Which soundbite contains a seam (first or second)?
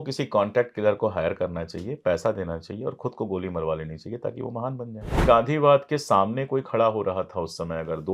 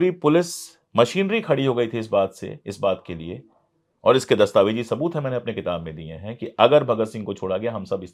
first